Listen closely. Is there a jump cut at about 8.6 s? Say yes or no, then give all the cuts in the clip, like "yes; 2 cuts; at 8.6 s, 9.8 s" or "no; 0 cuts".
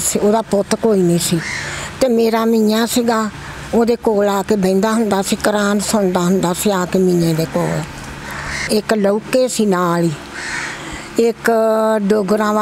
yes; 1 cut; at 8.6 s